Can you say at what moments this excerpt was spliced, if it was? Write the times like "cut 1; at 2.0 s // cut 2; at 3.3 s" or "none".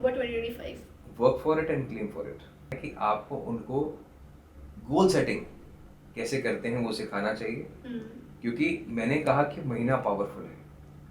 cut 1; at 2.8 s